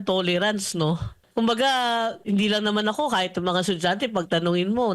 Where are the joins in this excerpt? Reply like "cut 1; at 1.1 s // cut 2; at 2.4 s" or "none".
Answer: cut 1; at 1.1 s // cut 2; at 2.2 s